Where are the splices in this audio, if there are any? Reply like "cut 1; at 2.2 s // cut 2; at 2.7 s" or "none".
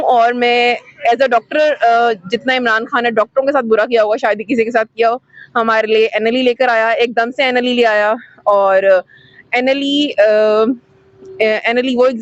none